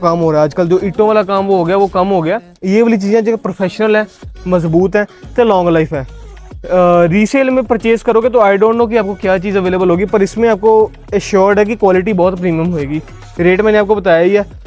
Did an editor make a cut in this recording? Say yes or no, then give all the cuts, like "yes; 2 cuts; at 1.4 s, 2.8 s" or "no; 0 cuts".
no; 0 cuts